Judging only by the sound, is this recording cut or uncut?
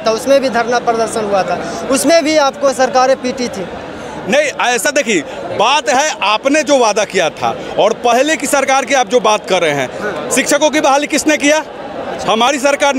uncut